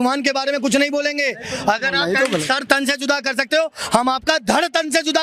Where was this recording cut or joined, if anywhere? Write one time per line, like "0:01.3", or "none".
none